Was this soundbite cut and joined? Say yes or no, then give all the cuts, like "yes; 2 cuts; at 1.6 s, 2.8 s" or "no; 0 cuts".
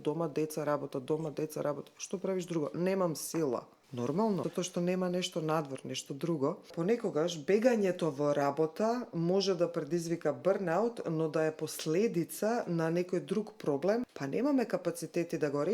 yes; 4 cuts; at 3.8 s, 4.4 s, 6.7 s, 14.2 s